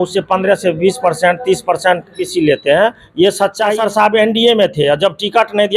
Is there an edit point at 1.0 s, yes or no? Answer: no